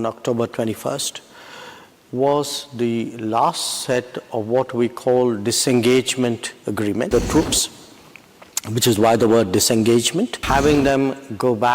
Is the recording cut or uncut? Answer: cut